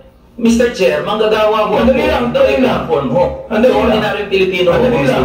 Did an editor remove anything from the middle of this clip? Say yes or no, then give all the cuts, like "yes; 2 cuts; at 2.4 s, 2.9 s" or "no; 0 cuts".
no; 0 cuts